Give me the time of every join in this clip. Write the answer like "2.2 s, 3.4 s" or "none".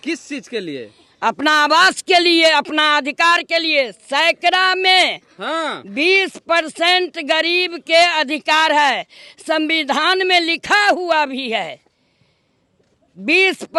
none